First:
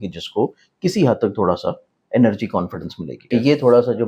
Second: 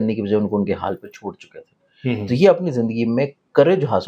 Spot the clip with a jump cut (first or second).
first